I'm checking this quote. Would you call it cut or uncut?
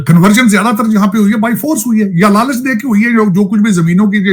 uncut